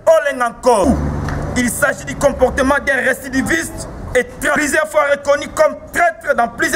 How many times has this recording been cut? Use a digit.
2